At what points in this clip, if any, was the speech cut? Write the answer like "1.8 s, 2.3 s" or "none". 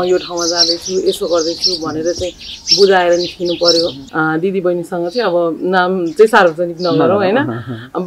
4.0 s